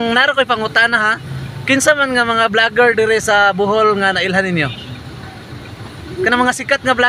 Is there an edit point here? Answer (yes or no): no